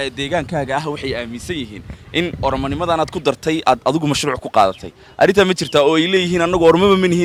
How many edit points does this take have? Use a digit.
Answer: 0